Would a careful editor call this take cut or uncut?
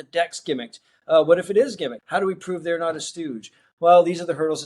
cut